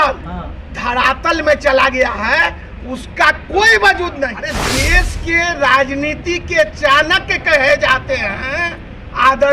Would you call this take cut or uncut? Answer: cut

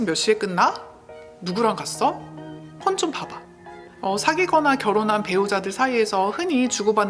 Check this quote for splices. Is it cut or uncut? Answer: uncut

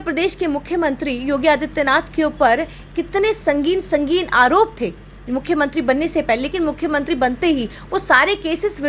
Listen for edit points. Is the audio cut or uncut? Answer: uncut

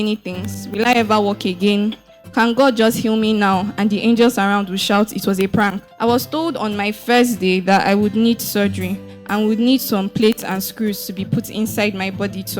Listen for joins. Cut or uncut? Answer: cut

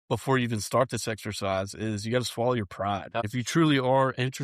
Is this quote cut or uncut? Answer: cut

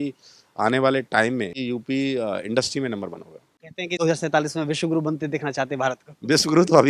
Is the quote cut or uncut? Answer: cut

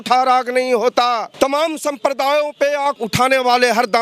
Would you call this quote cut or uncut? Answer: cut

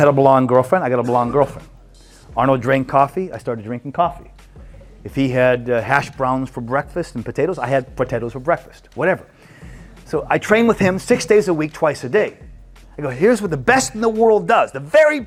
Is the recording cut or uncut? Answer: uncut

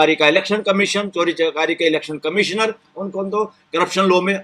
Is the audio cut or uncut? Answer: uncut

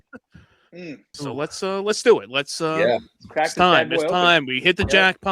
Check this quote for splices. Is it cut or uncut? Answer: cut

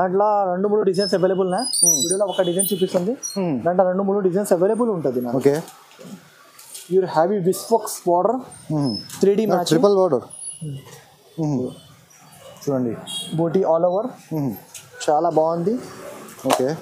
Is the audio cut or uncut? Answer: uncut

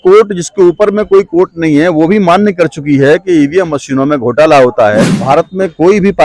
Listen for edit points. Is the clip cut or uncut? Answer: cut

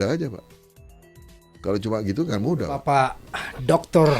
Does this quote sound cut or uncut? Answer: cut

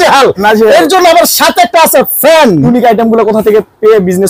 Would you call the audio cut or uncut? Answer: cut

